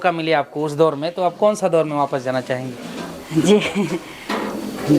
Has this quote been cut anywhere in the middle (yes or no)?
no